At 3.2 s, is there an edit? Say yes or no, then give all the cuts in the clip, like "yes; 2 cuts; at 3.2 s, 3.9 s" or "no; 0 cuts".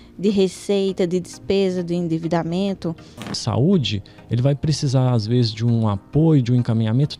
yes; 1 cut; at 3.2 s